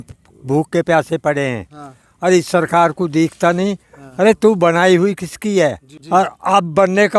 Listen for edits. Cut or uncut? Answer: cut